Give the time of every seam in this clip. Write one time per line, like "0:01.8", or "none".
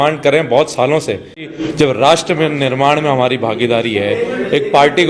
0:01.6